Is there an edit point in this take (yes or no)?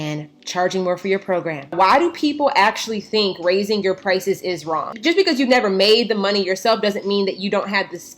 yes